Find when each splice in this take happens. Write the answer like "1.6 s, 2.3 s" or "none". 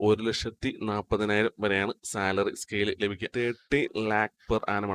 3.3 s